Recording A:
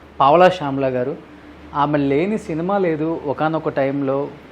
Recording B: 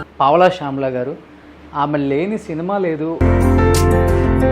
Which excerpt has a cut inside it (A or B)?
B